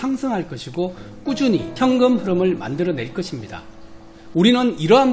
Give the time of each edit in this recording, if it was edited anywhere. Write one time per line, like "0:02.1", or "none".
0:01.7